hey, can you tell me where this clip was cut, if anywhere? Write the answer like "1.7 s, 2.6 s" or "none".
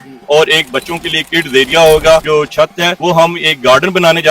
2.6 s